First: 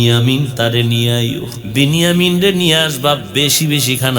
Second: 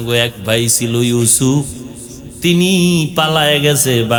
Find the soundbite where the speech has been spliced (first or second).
first